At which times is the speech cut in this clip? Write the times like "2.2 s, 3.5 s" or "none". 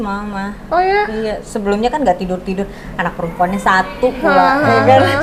none